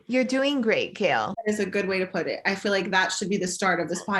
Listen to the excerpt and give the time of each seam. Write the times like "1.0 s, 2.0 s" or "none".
1.3 s